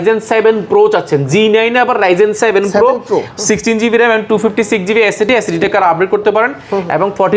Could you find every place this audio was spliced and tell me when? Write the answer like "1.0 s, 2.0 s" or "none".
none